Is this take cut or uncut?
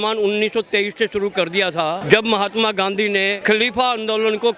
cut